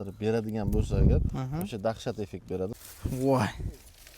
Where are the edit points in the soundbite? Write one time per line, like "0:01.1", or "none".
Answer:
0:02.7